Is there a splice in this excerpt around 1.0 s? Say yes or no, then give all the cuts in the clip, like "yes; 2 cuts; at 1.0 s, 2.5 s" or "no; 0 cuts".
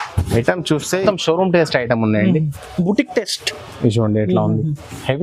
yes; 1 cut; at 1.0 s